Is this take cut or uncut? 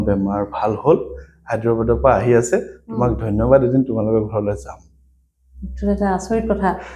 uncut